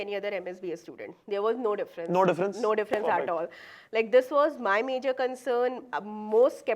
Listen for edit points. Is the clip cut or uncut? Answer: uncut